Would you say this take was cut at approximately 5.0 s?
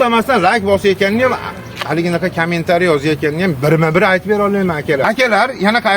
yes; 1 cut; at 5.0 s

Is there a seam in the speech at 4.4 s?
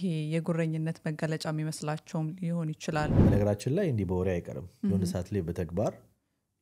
no; 1 cut; at 3.2 s

